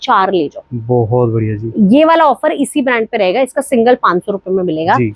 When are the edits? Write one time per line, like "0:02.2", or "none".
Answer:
none